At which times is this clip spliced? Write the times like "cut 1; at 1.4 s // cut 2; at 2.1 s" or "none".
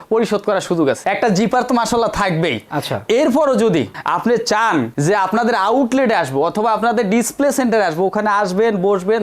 cut 1; at 1.0 s